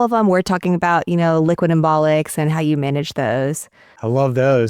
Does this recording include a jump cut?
no; 0 cuts

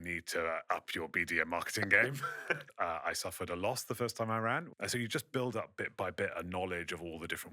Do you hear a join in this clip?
yes; 2 cuts; at 2.7 s, 4.7 s

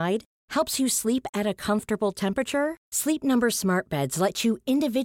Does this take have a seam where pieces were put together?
no; 0 cuts

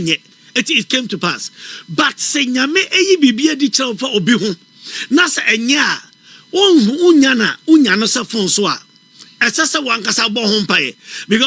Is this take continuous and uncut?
yes; 0 cuts

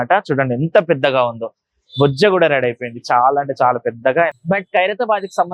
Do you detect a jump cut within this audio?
yes; 1 cut; at 4.4 s

